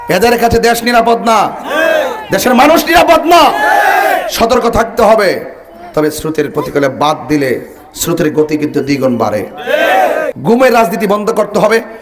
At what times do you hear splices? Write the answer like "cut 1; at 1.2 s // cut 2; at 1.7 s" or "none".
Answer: cut 1; at 10.3 s